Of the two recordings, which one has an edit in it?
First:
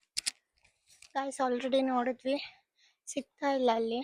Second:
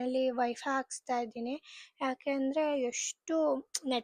first; 1 cut; at 0.9 s

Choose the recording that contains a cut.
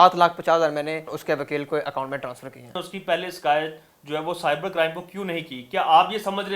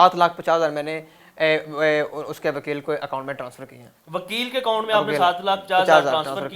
first; 2 cuts; at 1.1 s, 2.8 s

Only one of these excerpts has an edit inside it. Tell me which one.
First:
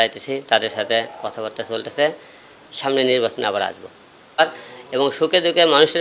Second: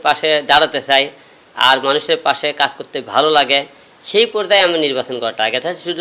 first; 1 cut; at 4.4 s

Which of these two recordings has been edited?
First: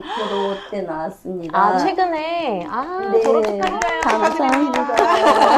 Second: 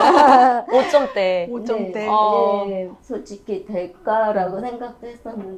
second; 1 cut; at 3.0 s

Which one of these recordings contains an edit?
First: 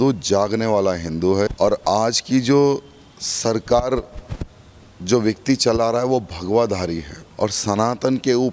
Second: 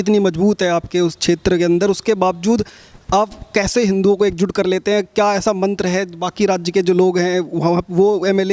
first; 2 cuts; at 1.5 s, 7.2 s

